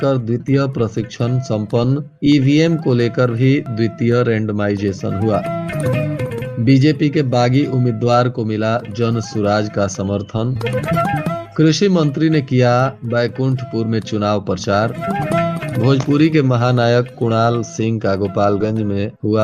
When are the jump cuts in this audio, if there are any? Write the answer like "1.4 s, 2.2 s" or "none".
none